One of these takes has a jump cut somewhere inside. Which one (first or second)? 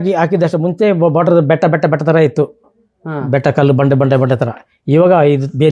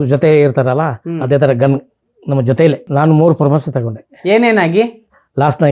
second